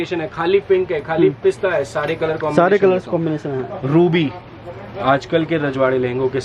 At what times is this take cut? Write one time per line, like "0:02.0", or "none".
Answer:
none